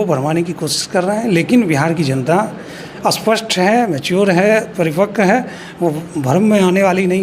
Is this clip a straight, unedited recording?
yes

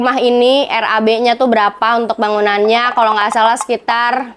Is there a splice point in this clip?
no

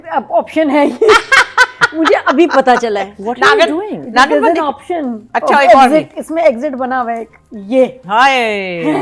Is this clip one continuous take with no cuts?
yes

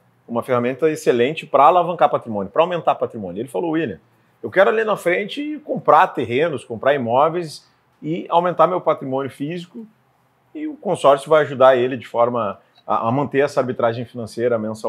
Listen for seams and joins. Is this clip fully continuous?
yes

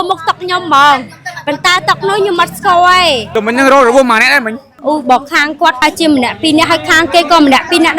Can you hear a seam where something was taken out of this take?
yes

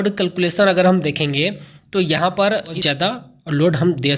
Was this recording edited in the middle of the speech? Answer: yes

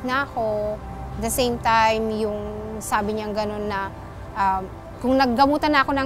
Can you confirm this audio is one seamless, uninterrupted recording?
yes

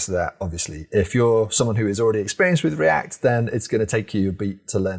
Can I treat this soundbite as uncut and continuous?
yes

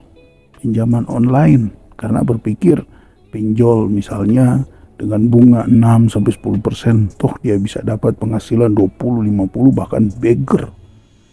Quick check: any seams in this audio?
no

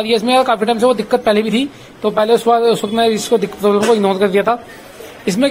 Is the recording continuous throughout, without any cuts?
yes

